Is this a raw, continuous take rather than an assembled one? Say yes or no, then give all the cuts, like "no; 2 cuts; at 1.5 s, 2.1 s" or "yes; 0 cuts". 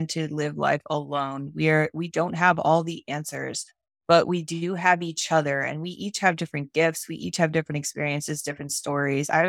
yes; 0 cuts